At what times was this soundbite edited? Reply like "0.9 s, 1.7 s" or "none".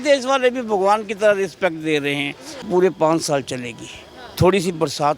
2.6 s

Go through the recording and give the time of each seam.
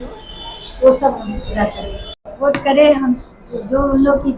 2.3 s

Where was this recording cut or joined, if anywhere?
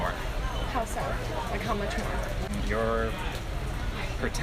2.5 s

